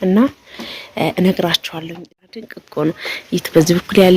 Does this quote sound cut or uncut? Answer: cut